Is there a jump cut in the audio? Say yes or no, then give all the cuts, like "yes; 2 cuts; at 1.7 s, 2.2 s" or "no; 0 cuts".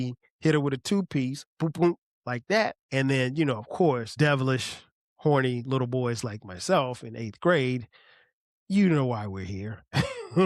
yes; 2 cuts; at 2.8 s, 4.1 s